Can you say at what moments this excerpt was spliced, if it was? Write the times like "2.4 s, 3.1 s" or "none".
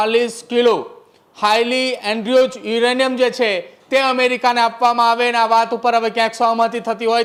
none

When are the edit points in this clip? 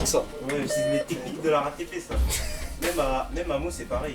none

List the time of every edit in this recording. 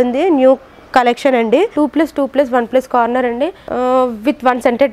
1.7 s, 3.6 s

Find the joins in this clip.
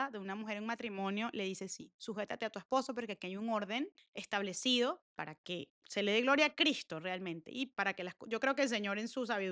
none

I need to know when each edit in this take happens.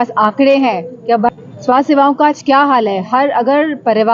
1.3 s

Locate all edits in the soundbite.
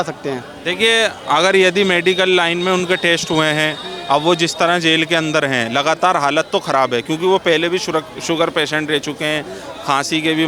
none

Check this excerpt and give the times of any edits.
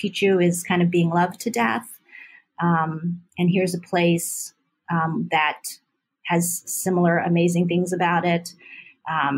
none

